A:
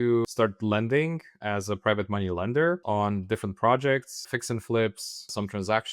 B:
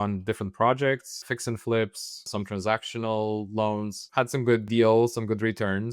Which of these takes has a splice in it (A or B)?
B